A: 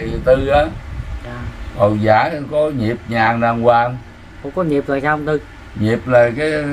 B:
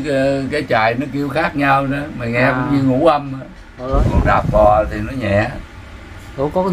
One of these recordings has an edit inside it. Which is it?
B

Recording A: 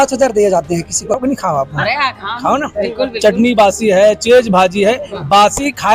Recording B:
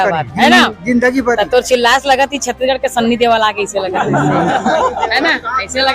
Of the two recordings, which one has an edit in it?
A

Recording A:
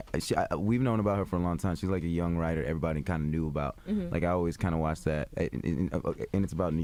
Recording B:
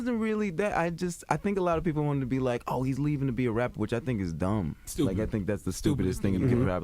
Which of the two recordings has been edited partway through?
B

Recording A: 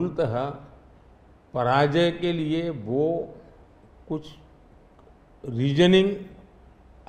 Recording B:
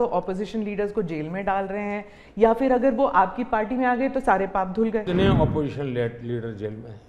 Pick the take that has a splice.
B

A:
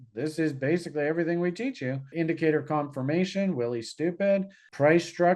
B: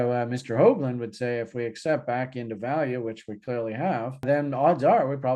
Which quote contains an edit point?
A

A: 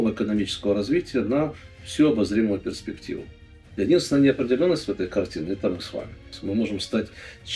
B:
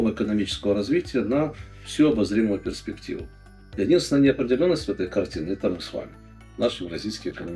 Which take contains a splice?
A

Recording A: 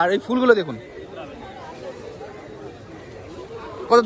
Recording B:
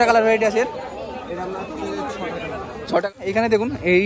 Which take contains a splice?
B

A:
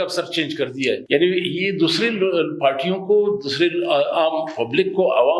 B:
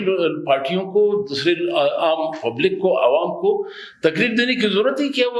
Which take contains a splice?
A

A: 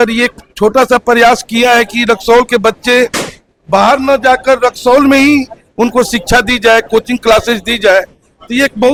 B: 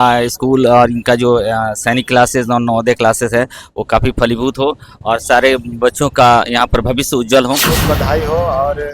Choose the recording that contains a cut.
B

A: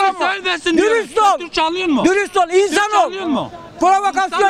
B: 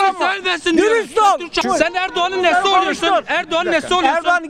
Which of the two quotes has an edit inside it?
B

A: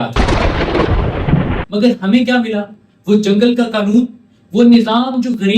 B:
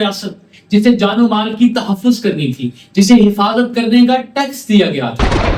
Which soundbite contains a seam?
A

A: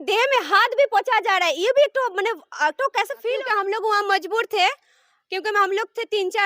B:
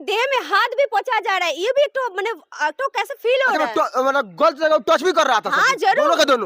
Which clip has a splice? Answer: A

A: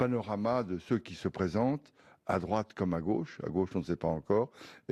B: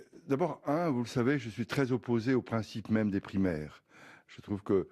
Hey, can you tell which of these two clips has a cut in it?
B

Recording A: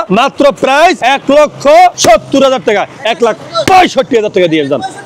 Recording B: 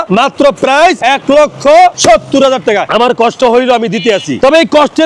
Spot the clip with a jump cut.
B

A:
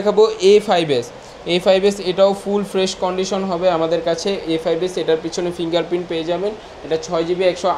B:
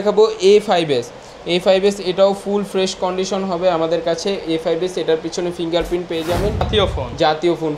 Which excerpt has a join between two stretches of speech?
B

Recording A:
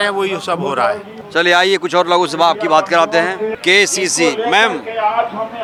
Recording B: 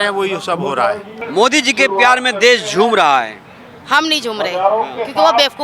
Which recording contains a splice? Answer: B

